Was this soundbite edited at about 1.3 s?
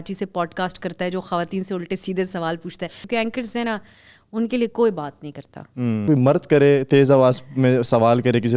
no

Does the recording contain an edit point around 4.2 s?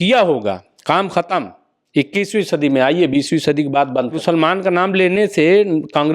yes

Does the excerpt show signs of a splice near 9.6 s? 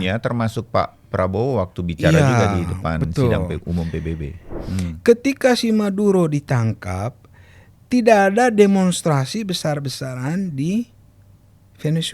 no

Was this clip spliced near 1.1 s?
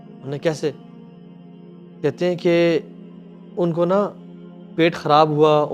no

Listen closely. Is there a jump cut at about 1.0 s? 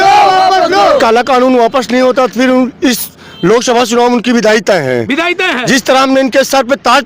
yes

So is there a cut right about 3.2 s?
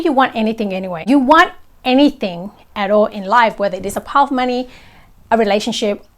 no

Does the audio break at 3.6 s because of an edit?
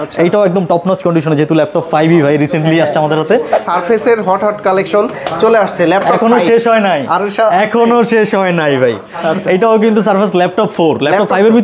yes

